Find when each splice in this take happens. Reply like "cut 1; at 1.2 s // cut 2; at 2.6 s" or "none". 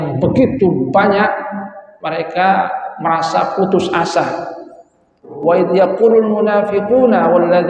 cut 1; at 5.3 s

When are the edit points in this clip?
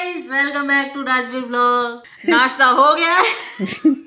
cut 1; at 2.0 s

